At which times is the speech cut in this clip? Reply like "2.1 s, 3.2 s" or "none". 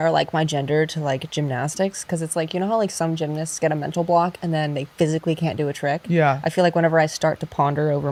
none